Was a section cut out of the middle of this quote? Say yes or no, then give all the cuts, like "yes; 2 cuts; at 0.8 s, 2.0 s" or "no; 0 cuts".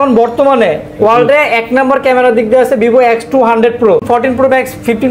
yes; 1 cut; at 4.0 s